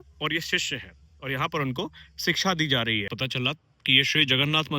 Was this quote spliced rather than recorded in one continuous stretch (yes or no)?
yes